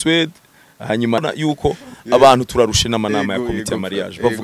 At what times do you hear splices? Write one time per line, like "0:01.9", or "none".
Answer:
0:01.2